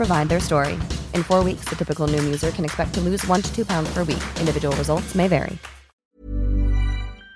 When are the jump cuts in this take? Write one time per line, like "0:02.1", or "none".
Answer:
0:06.2